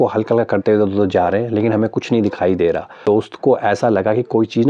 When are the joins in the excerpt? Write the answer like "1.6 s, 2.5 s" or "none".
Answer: 3.3 s